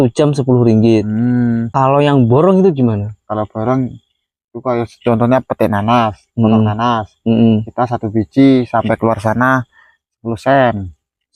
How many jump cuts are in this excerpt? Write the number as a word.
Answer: one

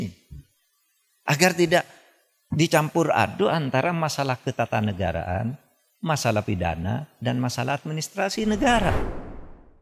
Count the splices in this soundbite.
one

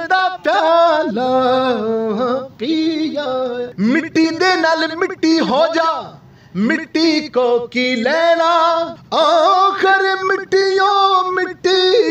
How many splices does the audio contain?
two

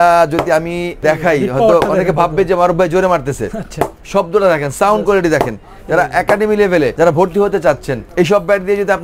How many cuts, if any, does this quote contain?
three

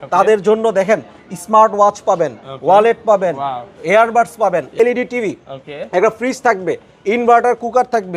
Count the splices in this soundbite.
one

